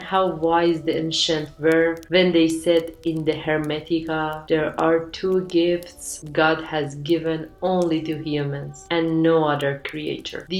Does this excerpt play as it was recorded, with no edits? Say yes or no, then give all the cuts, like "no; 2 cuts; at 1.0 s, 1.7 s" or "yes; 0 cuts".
yes; 0 cuts